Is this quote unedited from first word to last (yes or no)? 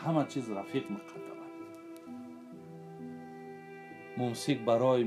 no